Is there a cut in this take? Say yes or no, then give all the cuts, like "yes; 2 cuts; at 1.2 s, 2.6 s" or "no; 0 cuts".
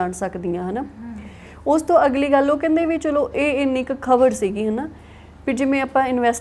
no; 0 cuts